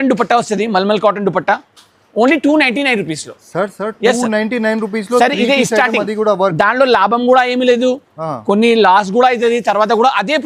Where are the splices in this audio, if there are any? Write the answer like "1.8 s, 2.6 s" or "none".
none